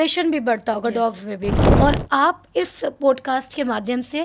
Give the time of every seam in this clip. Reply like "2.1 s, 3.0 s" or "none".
1.6 s